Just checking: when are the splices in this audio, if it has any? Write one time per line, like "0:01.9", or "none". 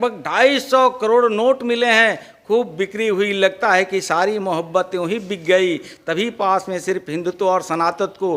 none

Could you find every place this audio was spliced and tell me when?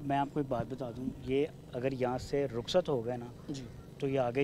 none

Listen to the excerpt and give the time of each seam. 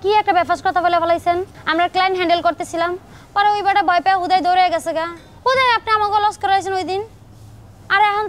none

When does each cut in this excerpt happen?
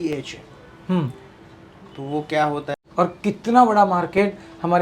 0:02.7

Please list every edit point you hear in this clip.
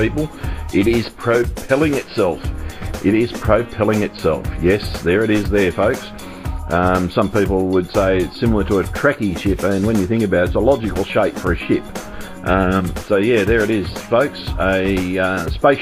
0:06.6

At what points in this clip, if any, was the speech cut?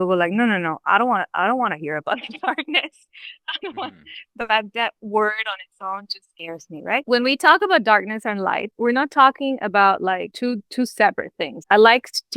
0:07.0
0:08.7
0:10.3
0:11.5

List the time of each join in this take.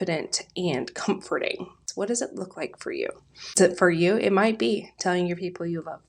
0:01.8
0:03.6

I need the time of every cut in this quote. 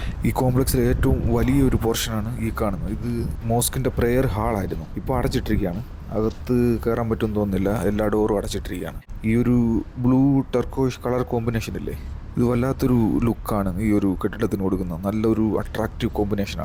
none

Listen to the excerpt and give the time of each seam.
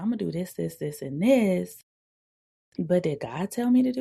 none

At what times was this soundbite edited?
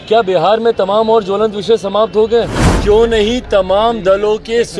0:02.6

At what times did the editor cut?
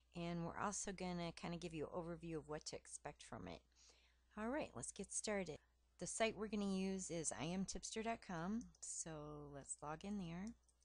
0:05.7

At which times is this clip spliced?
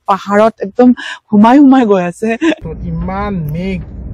0:02.6

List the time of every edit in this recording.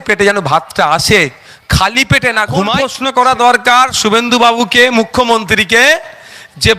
0:02.9

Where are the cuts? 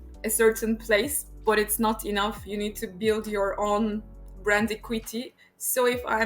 0:05.3

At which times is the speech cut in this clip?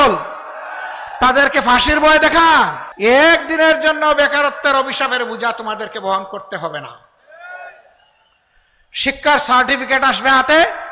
0:02.8

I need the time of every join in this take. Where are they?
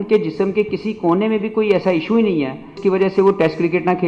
0:02.7

